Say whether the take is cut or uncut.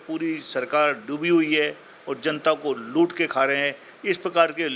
uncut